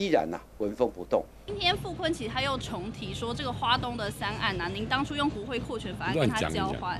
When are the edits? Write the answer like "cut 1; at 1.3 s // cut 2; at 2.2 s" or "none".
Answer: cut 1; at 1.4 s